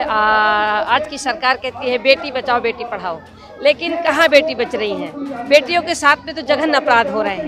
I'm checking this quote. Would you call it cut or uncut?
uncut